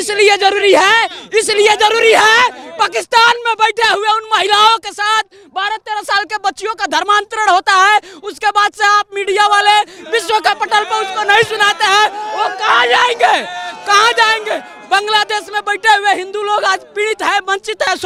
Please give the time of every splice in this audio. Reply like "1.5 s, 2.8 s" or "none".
none

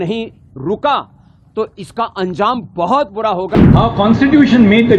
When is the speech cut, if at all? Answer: 3.6 s

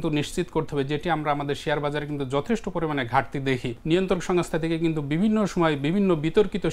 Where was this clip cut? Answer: 3.7 s

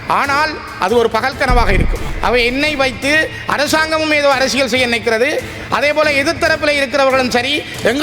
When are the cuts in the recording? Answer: 2.0 s

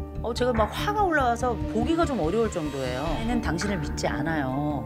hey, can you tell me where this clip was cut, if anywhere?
3.3 s

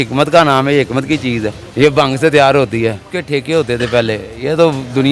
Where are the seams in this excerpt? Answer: 1.6 s, 3.1 s

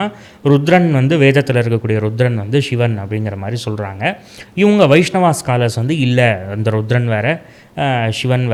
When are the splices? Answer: none

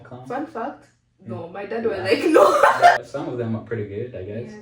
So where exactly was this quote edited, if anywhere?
3.1 s

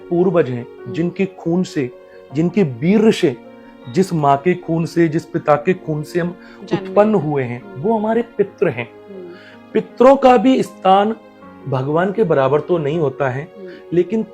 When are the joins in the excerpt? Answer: none

